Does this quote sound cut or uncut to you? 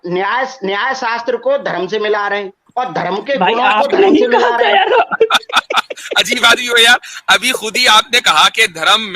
cut